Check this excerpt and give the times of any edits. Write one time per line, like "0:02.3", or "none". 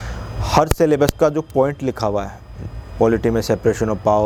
none